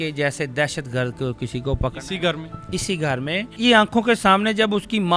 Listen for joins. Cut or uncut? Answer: cut